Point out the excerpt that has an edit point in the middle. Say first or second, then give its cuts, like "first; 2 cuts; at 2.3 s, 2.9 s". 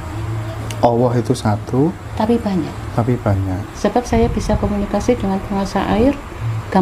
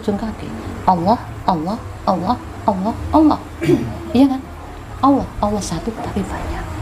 first; 1 cut; at 3.7 s